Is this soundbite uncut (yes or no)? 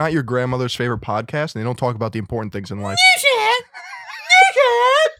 yes